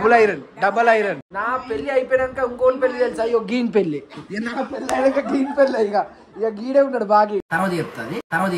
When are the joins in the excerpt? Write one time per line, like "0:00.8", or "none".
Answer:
0:01.3
0:07.5